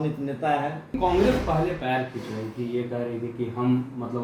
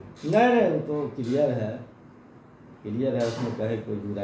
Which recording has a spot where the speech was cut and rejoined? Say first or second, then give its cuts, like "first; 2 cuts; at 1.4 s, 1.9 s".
first; 1 cut; at 1.0 s